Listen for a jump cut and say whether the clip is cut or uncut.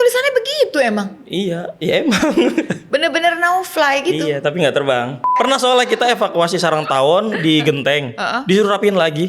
cut